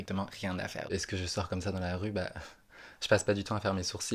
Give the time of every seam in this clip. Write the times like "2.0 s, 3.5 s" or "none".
0.9 s, 3.0 s